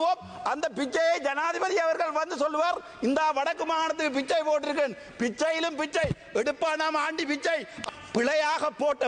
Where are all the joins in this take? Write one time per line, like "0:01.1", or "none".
0:07.9